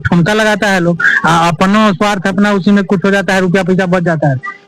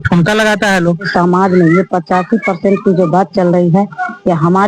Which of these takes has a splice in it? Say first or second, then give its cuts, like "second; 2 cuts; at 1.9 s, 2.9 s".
second; 1 cut; at 1.1 s